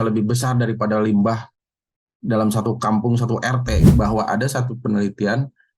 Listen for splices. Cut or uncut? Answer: cut